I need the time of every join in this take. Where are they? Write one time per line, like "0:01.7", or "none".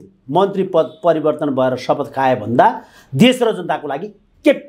none